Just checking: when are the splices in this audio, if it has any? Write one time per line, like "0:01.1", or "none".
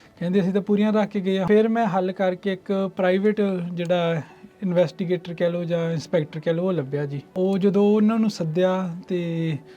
0:01.5
0:07.2